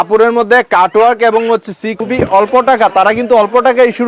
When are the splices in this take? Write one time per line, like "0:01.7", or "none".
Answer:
0:01.9